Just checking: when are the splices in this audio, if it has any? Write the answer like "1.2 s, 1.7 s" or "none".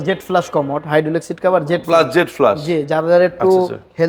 none